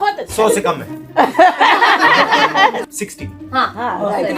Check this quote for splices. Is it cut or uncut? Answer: cut